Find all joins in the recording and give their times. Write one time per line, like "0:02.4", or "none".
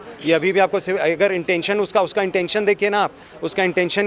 none